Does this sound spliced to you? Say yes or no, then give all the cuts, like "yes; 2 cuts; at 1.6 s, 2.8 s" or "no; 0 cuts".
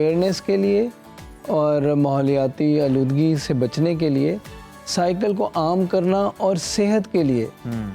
no; 0 cuts